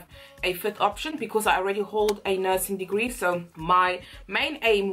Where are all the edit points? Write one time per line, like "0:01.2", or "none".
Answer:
none